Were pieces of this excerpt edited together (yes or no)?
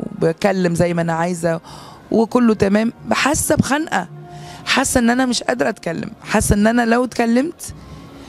no